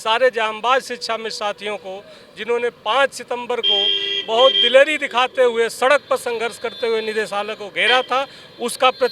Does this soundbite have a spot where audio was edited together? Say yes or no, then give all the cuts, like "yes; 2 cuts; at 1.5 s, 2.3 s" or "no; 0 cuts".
no; 0 cuts